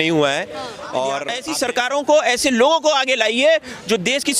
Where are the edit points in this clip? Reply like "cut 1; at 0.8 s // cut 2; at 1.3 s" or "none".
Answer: cut 1; at 1.4 s